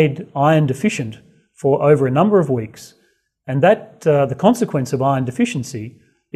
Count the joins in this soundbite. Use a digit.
1